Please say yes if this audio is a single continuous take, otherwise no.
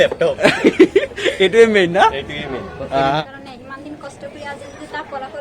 no